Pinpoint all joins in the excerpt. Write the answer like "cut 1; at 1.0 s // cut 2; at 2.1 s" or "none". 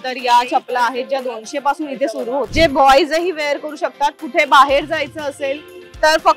cut 1; at 2.5 s